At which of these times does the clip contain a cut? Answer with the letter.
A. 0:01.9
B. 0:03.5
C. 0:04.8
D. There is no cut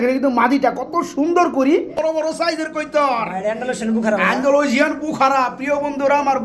A